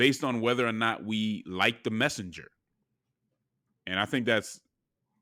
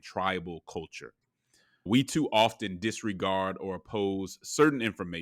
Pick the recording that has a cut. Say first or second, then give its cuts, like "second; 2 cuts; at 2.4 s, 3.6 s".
second; 1 cut; at 1.9 s